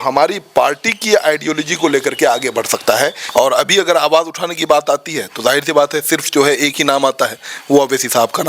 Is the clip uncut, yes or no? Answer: no